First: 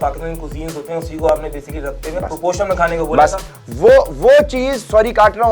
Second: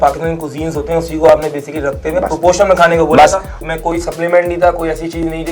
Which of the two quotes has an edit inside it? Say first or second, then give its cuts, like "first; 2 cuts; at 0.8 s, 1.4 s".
second; 1 cut; at 3.6 s